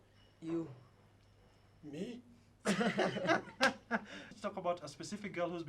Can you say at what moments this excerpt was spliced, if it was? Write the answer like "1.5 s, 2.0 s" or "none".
4.3 s